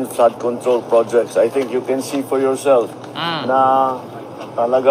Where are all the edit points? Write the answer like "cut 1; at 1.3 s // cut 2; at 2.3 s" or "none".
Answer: cut 1; at 2.8 s